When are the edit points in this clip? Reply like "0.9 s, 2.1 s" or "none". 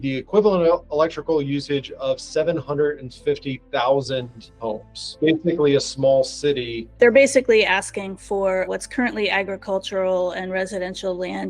5.1 s, 6.8 s, 8.7 s